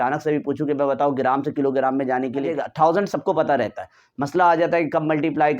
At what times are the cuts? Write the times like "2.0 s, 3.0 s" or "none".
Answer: 2.5 s